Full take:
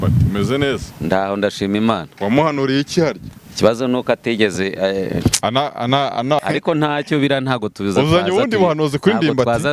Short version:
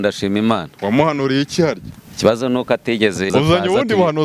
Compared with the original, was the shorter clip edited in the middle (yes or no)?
yes